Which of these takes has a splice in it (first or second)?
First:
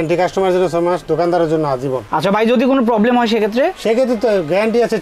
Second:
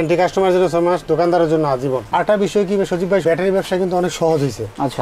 second